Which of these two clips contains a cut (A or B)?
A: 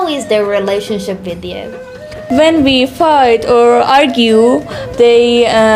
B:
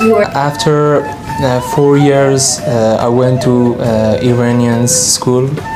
A